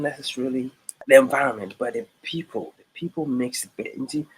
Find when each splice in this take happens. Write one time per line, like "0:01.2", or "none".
0:01.0